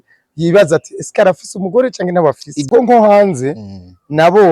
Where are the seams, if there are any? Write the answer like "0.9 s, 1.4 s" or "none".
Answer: 2.5 s